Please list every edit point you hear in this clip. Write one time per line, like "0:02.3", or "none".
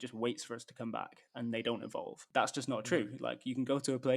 0:02.2

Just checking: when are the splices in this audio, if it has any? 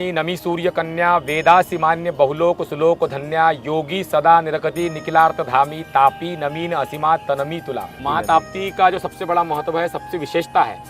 0:08.0

